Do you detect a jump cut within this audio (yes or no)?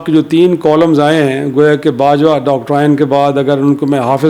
no